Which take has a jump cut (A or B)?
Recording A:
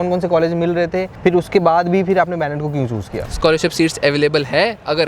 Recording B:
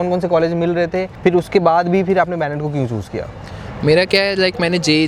A